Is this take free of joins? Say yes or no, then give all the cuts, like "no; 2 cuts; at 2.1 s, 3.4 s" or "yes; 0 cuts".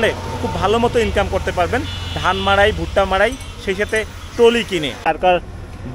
no; 1 cut; at 5.0 s